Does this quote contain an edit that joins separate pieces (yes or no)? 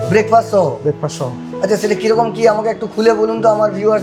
no